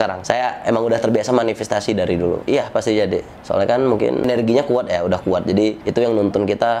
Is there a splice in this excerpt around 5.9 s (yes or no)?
no